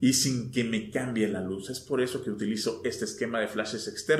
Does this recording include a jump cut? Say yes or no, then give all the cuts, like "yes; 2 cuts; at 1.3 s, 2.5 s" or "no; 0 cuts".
no; 0 cuts